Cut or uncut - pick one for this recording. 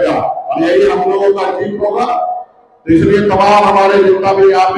uncut